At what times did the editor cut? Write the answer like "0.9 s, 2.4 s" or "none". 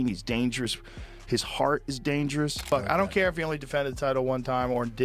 2.6 s